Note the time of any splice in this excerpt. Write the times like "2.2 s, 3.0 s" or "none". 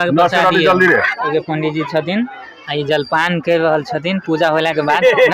1.3 s